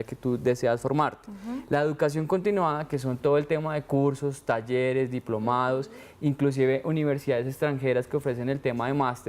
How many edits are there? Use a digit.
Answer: 1